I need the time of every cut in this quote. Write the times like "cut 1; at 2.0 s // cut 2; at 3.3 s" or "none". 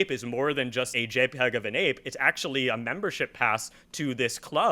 cut 1; at 0.9 s